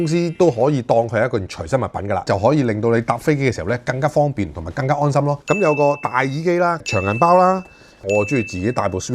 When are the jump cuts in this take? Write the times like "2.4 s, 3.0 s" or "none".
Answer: 2.2 s, 5.4 s, 8.1 s